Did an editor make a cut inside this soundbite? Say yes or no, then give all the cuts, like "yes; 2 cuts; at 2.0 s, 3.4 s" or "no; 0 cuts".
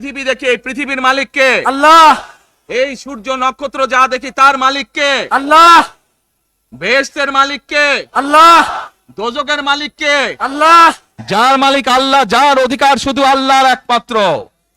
yes; 1 cut; at 11.1 s